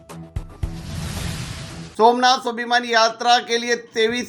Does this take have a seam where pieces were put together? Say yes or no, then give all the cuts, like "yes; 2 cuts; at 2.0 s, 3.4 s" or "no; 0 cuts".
yes; 1 cut; at 1.6 s